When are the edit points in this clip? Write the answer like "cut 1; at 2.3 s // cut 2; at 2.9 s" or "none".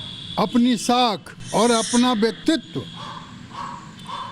cut 1; at 1.3 s